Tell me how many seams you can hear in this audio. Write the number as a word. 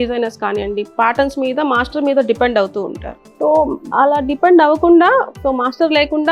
one